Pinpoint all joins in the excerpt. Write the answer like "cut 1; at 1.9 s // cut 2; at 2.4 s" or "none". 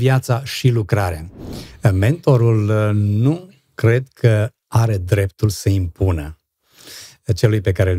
cut 1; at 1.4 s